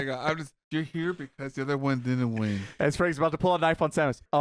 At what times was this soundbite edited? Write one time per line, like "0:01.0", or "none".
none